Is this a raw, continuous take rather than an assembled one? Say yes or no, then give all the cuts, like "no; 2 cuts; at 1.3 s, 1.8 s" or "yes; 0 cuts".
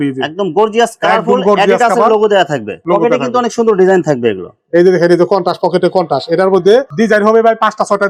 yes; 0 cuts